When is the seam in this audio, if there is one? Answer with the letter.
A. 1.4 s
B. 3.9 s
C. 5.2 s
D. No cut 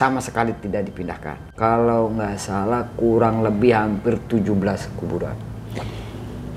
A